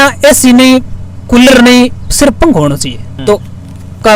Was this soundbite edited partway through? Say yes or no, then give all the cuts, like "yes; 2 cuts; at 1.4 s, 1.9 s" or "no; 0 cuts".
yes; 1 cut; at 3.1 s